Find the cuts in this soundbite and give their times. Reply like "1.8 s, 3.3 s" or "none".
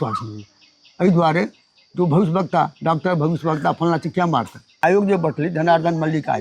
4.8 s